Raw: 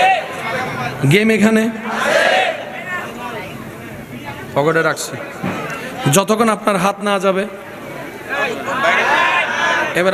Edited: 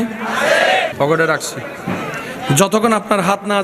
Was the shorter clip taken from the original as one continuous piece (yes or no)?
no